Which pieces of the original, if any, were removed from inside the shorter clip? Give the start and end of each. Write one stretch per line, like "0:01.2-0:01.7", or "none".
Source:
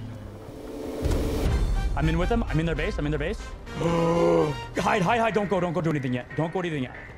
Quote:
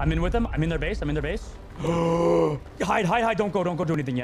none